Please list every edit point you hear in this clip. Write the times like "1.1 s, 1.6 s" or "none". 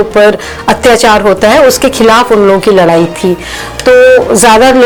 none